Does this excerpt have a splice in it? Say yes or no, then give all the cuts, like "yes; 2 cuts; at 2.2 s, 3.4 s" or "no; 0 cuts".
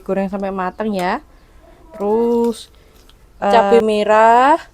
yes; 1 cut; at 3.5 s